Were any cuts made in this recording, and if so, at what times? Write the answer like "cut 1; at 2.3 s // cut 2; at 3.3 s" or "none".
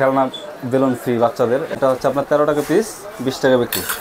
cut 1; at 1.7 s